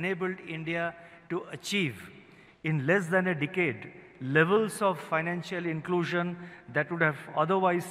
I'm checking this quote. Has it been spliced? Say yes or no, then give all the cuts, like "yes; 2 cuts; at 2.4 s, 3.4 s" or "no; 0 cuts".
no; 0 cuts